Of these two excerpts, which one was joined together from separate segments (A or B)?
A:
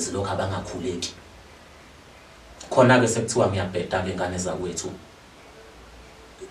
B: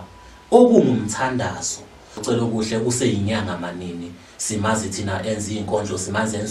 B